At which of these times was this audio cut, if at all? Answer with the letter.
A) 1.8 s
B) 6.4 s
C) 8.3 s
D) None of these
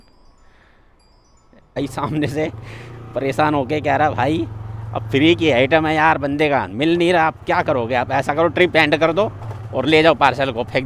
A